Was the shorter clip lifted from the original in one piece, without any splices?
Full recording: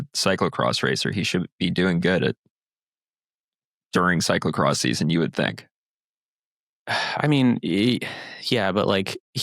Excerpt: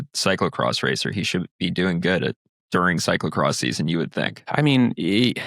no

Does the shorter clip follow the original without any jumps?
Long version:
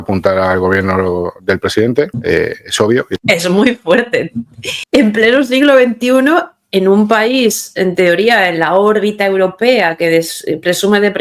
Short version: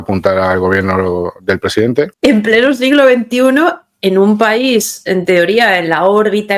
no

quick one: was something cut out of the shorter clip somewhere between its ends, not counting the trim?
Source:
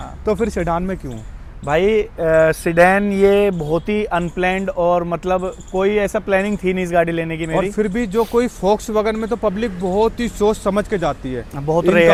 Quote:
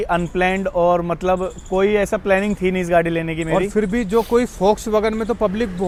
no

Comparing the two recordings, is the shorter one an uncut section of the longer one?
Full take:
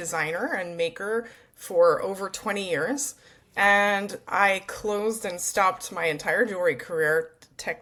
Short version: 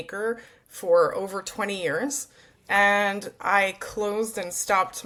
yes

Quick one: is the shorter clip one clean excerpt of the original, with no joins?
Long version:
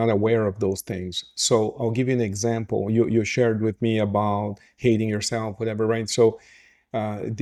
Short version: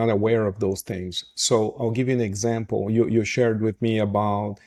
yes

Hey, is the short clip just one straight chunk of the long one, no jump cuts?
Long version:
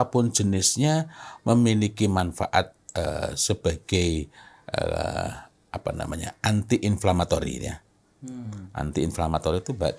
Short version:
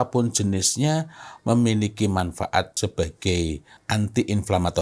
no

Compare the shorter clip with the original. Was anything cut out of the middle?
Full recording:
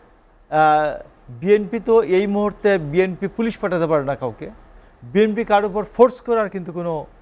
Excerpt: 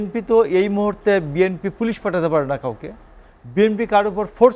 no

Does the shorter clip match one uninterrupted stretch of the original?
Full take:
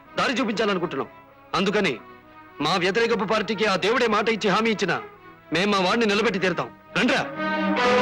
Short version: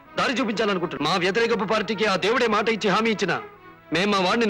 no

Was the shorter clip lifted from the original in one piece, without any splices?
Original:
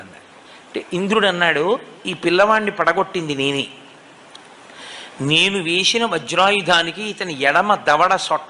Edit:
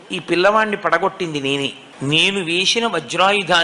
no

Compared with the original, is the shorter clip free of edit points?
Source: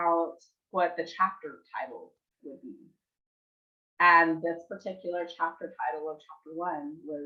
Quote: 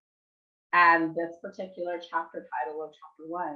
yes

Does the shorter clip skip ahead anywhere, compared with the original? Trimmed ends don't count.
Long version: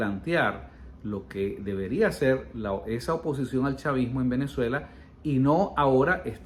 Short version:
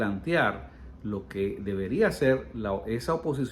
no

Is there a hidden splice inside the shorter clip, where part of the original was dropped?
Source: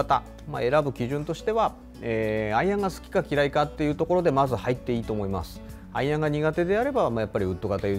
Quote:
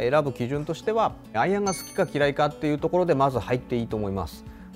yes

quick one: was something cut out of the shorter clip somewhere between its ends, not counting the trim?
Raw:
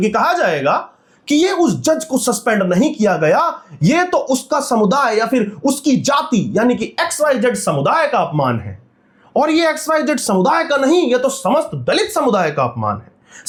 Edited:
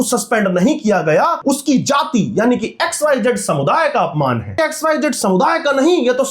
yes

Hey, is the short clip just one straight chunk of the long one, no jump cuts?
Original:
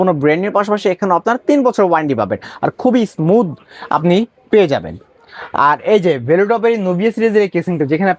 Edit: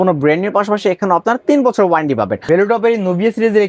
no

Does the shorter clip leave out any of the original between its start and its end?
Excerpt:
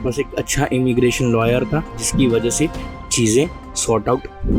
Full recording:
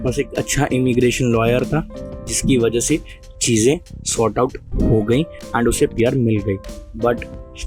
yes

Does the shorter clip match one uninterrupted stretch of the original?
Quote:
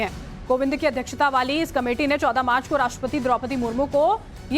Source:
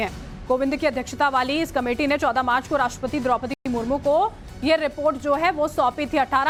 no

